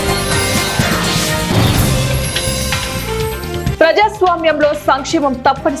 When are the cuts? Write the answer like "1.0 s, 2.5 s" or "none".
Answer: 0.9 s, 3.7 s